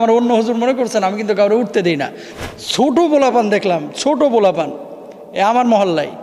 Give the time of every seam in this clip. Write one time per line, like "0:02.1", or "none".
0:02.2